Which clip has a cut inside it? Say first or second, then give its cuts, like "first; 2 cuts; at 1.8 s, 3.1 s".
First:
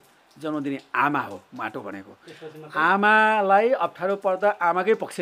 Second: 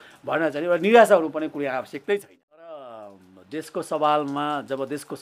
second; 1 cut; at 2.7 s